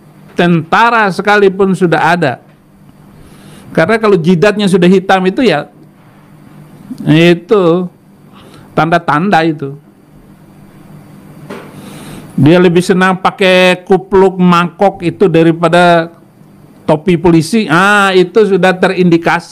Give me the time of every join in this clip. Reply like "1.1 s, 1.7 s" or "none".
none